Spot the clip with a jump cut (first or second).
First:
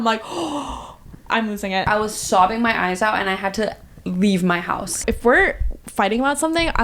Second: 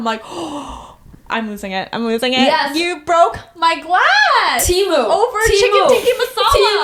first